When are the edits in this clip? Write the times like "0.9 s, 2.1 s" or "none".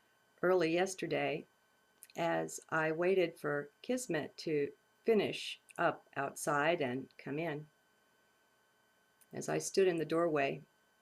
7.0 s